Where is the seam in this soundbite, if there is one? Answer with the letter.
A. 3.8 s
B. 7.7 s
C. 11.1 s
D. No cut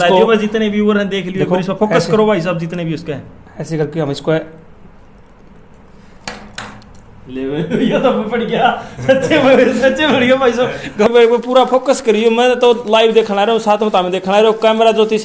C